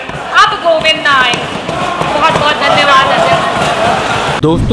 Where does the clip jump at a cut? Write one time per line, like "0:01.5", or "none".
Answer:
none